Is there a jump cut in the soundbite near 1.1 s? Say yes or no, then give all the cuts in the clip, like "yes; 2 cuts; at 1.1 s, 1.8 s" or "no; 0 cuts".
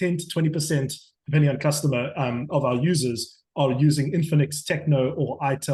no; 0 cuts